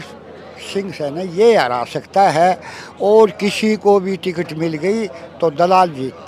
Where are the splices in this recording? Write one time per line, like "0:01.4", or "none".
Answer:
none